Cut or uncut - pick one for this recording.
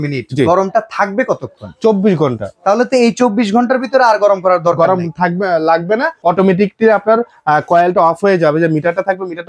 uncut